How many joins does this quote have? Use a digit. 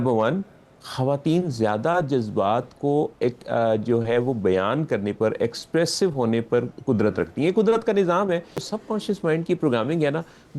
1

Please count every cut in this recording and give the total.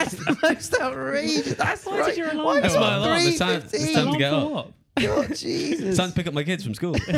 0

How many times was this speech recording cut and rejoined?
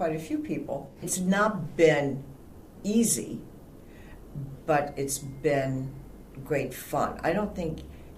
1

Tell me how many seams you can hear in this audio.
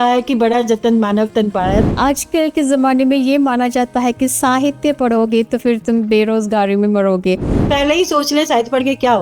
2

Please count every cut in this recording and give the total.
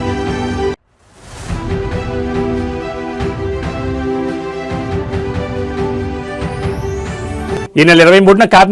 2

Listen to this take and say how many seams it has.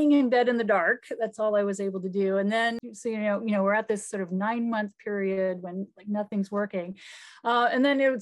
1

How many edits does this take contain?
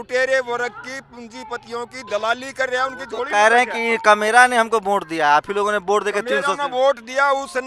0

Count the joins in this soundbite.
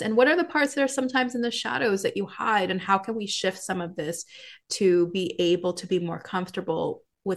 0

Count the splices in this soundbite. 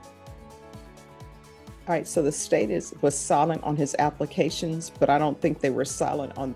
1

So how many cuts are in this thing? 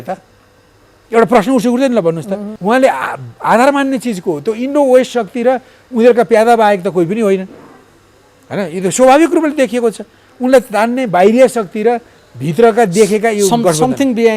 1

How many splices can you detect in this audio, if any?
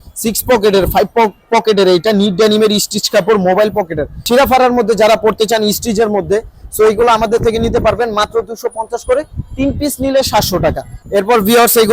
2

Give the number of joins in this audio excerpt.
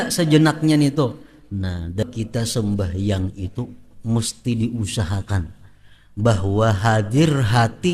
1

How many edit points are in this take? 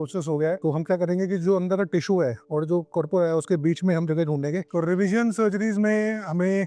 1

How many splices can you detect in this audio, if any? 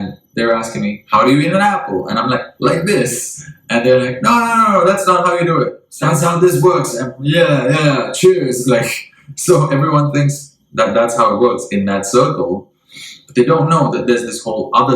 1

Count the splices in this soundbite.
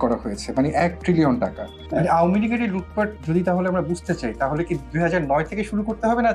1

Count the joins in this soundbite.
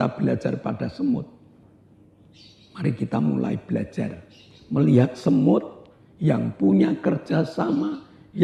0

